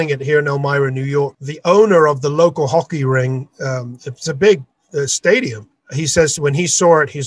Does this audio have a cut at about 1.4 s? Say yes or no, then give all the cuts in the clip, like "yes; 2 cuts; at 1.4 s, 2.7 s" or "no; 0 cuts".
no; 0 cuts